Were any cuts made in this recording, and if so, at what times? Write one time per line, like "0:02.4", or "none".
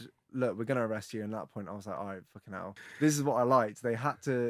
0:02.8